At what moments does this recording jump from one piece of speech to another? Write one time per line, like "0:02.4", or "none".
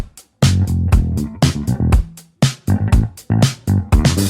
none